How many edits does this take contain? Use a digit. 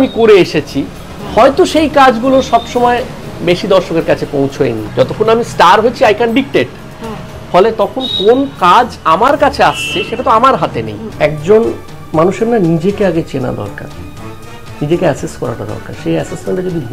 2